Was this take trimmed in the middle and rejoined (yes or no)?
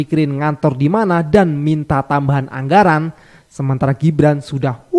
no